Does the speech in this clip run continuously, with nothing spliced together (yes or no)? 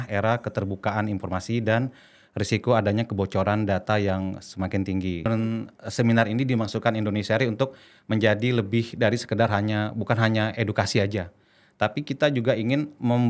no